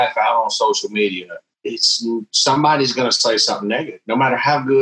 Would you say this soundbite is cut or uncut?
uncut